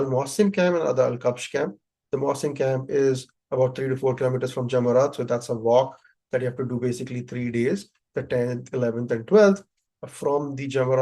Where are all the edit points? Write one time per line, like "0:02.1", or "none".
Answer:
none